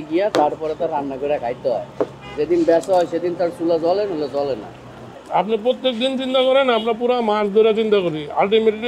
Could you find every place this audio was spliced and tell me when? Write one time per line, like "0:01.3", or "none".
none